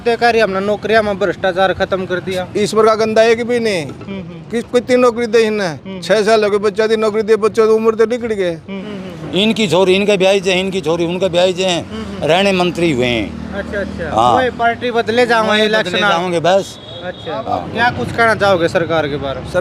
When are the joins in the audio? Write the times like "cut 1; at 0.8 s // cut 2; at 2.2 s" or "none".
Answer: cut 1; at 8.8 s // cut 2; at 17.7 s

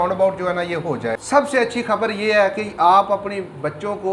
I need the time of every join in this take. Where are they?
cut 1; at 1.1 s

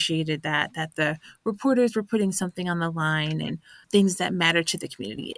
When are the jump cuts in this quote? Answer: cut 1; at 3.7 s

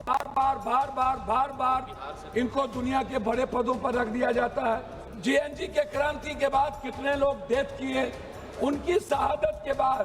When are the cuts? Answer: cut 1; at 5.1 s

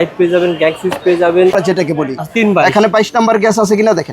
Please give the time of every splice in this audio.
cut 1; at 1.5 s

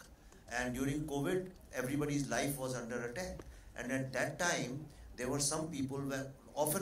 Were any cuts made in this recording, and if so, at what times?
none

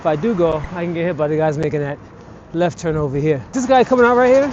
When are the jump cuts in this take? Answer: cut 1; at 3.5 s

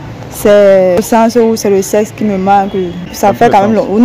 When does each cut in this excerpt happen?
cut 1; at 1.0 s // cut 2; at 3.1 s

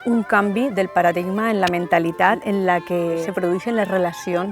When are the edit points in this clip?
cut 1; at 2.4 s // cut 2; at 3.3 s

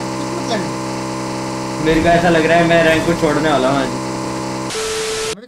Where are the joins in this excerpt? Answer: none

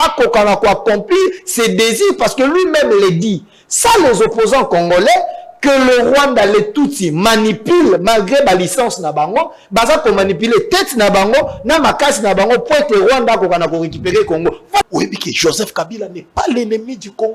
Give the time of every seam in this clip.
cut 1; at 14.9 s

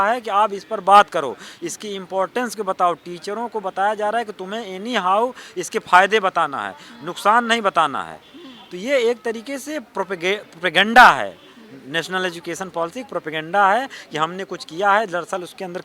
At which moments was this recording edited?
none

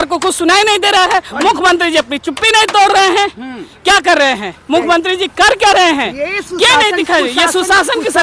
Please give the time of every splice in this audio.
none

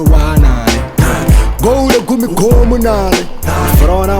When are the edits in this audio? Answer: cut 1; at 1.6 s

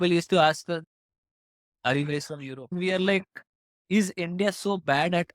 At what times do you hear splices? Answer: cut 1; at 0.8 s // cut 2; at 2.7 s

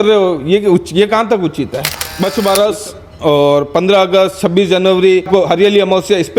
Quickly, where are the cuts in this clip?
cut 1; at 2.0 s // cut 2; at 5.3 s

